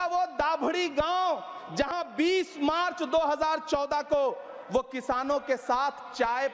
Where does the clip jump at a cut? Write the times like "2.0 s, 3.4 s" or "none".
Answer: none